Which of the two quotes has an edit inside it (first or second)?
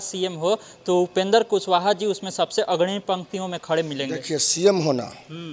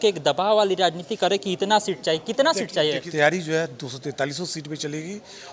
second